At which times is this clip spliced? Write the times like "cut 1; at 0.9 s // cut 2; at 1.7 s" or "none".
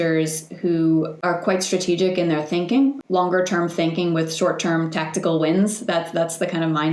cut 1; at 1.1 s // cut 2; at 3.0 s